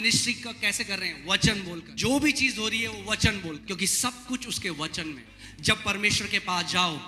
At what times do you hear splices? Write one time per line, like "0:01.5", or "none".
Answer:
0:01.9
0:03.6
0:05.3